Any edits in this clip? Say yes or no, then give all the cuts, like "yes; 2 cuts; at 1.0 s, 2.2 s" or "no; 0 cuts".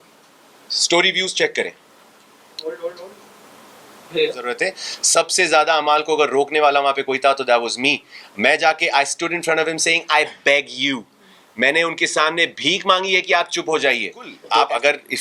yes; 2 cuts; at 4.5 s, 14.4 s